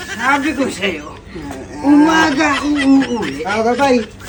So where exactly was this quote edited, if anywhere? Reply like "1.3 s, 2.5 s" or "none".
none